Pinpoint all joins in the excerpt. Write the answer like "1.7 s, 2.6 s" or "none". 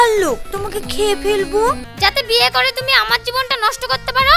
1.9 s